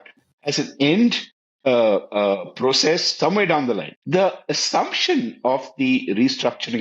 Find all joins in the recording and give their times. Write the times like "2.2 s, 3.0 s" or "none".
3.9 s